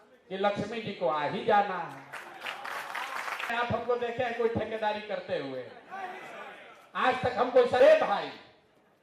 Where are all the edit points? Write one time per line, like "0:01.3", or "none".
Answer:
0:03.5
0:07.8